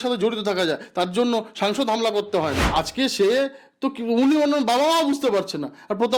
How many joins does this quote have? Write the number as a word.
one